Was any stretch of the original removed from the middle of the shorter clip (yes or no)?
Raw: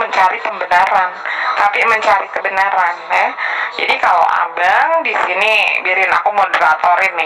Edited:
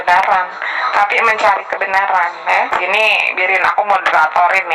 yes